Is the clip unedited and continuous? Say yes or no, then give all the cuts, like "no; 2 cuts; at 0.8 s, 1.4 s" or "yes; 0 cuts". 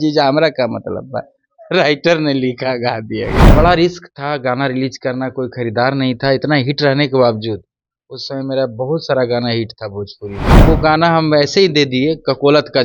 no; 2 cuts; at 3.5 s, 10.6 s